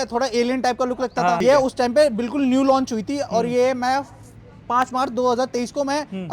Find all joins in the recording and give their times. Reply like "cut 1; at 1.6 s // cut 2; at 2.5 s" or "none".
cut 1; at 1.4 s